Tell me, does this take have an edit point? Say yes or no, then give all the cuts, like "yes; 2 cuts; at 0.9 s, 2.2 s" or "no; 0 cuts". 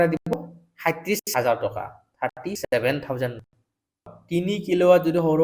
yes; 1 cut; at 4.1 s